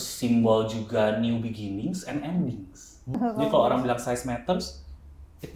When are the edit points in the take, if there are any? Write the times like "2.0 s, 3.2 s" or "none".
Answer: 3.1 s